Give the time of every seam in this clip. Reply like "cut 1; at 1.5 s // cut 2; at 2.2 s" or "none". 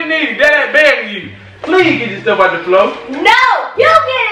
none